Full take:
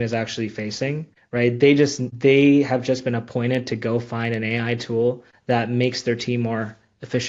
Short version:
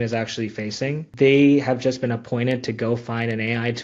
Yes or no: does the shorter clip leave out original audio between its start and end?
yes